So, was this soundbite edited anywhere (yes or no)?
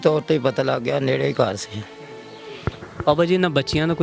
no